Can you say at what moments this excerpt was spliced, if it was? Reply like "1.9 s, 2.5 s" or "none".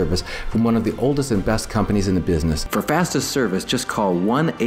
2.6 s